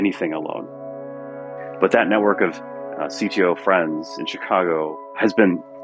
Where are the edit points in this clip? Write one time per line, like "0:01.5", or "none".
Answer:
0:01.2
0:05.1

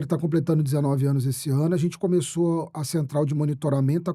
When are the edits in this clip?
none

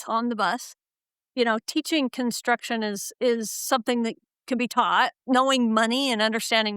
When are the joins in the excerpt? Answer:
0:01.2
0:05.2

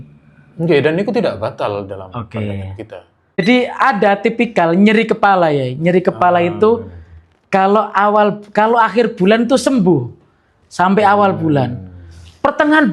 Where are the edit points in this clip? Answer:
0:03.4

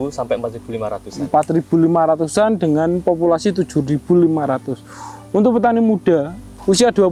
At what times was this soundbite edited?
none

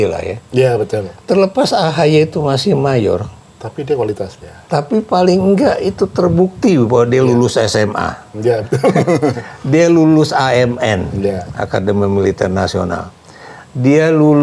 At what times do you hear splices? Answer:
none

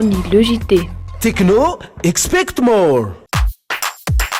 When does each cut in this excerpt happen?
0:03.2

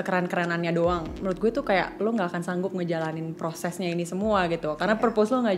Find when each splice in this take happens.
none

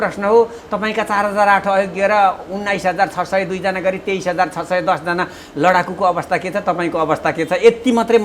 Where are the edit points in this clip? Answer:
none

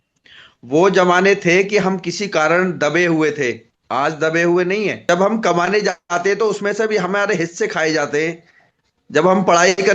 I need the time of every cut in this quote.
0:05.0

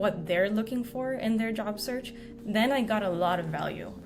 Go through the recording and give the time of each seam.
0:02.2

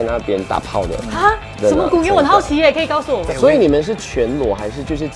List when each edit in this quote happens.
0:03.1

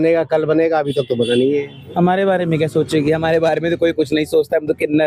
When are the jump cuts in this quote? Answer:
0:01.8

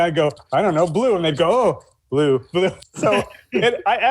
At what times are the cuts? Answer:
0:02.9

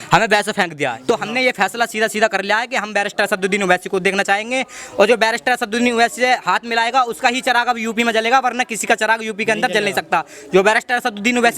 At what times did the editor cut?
0:01.0

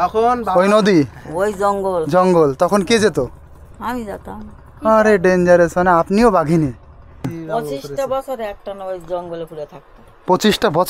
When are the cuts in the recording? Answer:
0:07.4

